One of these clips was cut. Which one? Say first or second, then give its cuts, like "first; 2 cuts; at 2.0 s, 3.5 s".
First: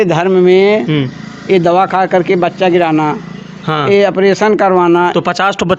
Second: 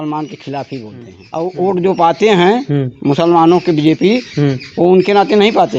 second; 1 cut; at 1.2 s